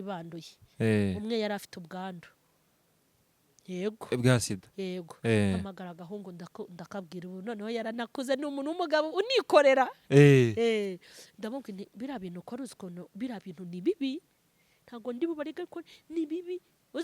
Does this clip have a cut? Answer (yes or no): no